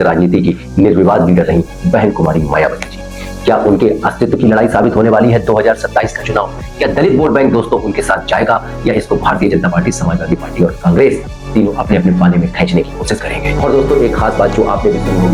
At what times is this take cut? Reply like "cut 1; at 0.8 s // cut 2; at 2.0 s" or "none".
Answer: none